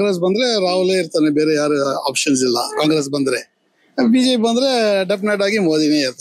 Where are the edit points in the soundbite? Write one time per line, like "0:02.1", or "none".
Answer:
none